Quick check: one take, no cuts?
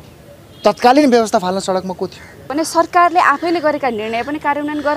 no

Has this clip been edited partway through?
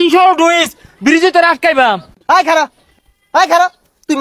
yes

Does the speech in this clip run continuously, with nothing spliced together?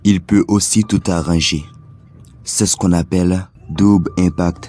no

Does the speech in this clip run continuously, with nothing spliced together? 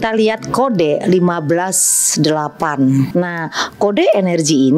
no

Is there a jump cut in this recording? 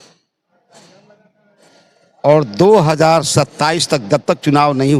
no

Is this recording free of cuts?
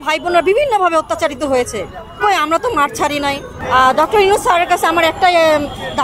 no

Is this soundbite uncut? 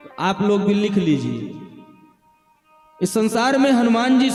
yes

